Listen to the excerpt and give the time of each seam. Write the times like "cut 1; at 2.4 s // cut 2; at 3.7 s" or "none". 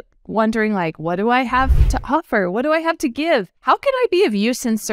cut 1; at 3.5 s